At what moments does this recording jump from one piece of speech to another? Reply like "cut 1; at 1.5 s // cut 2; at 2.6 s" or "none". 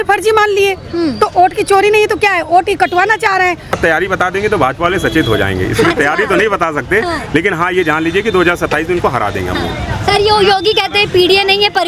cut 1; at 3.8 s